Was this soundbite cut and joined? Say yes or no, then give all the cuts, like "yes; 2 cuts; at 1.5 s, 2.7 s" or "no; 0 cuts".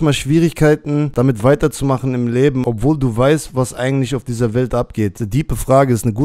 yes; 3 cuts; at 1.1 s, 2.6 s, 5.2 s